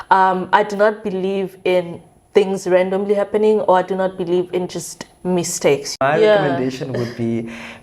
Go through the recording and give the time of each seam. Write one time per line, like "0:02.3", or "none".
0:05.9